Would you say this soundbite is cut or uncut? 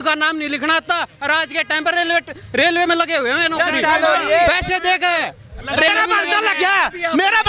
cut